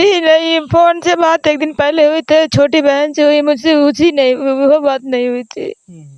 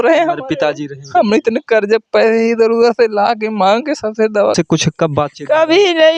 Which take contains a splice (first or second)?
second